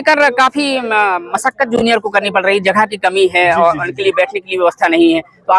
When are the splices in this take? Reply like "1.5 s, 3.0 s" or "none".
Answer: none

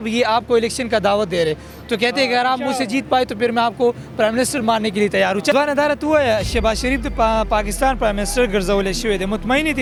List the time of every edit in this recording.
none

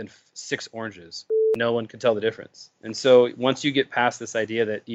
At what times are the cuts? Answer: 1.5 s

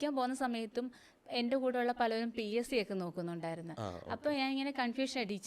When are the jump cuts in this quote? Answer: none

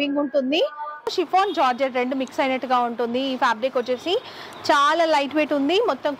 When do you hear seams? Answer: 1.1 s

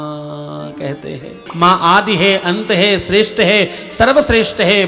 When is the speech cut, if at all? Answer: 1.4 s

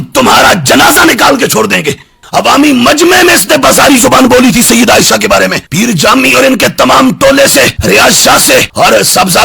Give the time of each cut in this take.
2.0 s

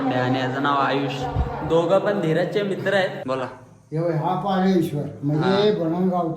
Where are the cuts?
3.2 s

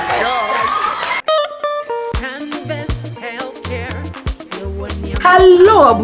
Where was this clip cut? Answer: 1.2 s

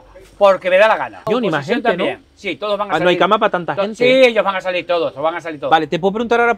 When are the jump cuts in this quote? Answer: 1.3 s, 5.5 s

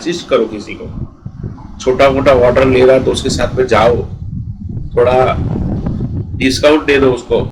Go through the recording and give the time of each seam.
none

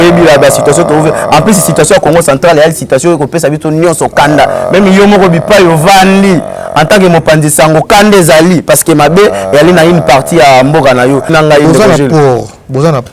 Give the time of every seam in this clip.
11.3 s

